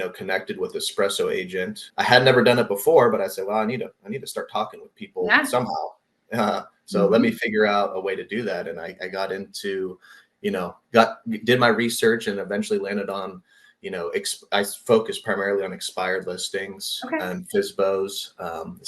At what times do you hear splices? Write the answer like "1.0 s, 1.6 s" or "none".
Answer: 1.8 s